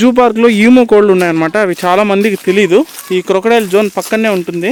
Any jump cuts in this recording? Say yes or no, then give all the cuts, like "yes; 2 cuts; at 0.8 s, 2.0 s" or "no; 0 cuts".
no; 0 cuts